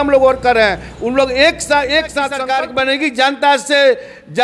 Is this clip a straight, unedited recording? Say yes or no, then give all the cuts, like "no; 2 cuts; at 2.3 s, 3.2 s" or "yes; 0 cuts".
no; 1 cut; at 2.4 s